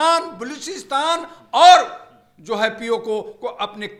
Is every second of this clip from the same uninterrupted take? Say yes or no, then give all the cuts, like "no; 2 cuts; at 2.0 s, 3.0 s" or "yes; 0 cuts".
yes; 0 cuts